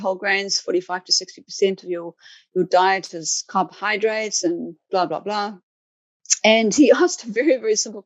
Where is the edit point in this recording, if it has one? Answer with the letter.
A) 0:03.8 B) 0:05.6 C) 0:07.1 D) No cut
D